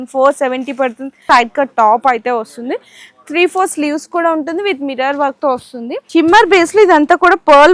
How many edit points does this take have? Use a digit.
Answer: 2